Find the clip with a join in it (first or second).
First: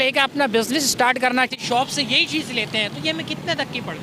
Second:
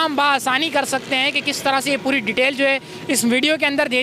first